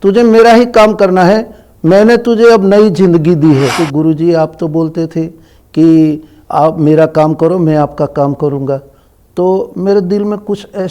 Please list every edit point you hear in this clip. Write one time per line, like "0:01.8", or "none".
0:03.8